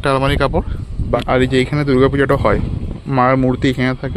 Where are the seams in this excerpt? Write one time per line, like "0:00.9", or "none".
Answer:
0:01.2

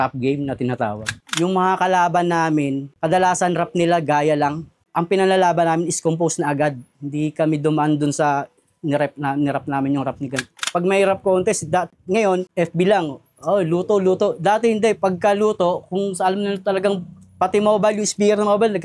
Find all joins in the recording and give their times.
0:01.2
0:04.8
0:10.6

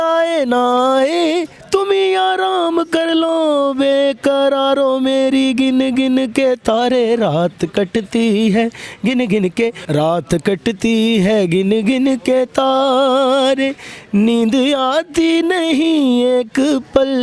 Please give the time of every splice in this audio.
0:09.8

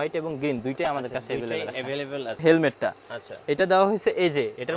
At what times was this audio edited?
0:02.4

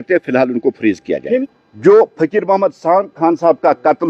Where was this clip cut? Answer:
0:01.6

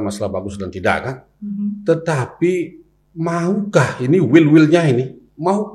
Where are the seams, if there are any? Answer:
none

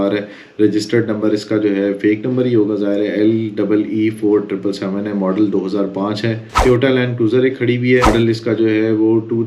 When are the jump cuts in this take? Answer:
0:06.5
0:08.1

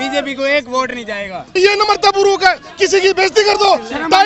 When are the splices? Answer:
0:01.5

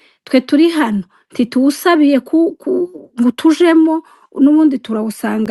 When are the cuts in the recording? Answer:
none

